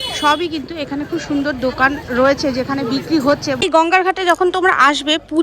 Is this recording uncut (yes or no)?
no